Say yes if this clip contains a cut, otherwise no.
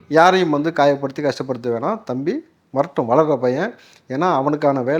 no